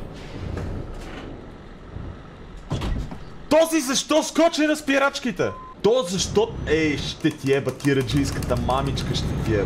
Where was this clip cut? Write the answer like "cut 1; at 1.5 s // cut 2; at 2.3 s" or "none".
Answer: cut 1; at 5.6 s